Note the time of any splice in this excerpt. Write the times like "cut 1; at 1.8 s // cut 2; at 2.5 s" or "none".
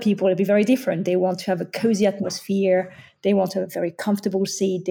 none

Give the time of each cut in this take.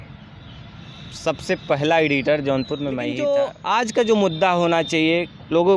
cut 1; at 3.1 s

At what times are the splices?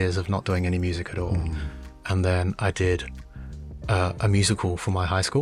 none

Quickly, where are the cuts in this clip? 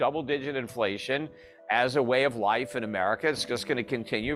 none

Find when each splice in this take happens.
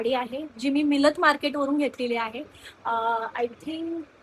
none

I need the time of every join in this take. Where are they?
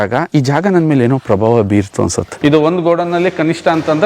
cut 1; at 2.4 s

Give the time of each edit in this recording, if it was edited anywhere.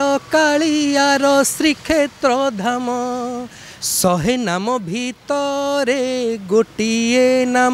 none

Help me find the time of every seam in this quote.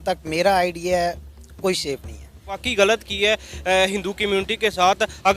cut 1; at 2.6 s

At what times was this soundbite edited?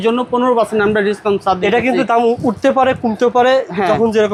none

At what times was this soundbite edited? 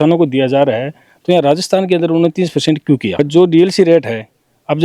none

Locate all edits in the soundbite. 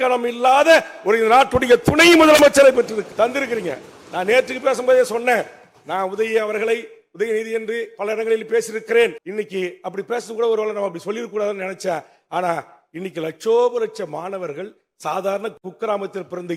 cut 1; at 3.1 s // cut 2; at 9.2 s

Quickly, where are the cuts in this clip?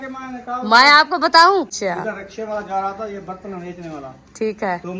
cut 1; at 1.7 s

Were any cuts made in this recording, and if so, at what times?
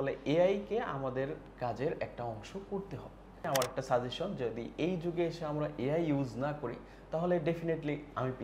cut 1; at 3.5 s

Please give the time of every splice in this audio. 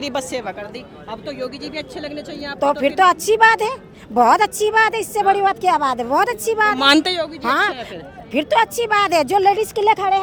none

